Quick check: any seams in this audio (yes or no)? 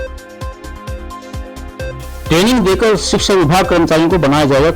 no